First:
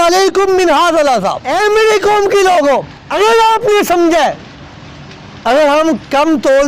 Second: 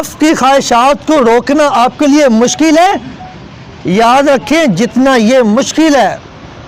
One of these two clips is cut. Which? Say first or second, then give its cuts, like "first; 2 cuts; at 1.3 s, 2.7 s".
first; 2 cuts; at 1.4 s, 3.0 s